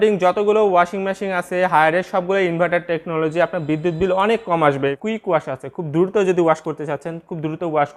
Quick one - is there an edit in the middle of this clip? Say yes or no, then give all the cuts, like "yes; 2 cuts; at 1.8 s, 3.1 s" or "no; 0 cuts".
yes; 1 cut; at 4.8 s